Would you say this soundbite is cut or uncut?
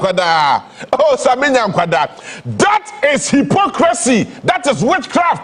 uncut